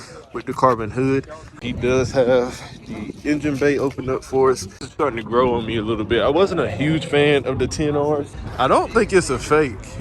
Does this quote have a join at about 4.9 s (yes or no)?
yes